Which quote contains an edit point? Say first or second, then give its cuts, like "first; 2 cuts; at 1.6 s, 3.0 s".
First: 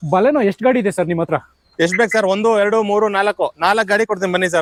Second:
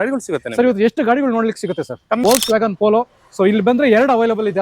second; 1 cut; at 2.2 s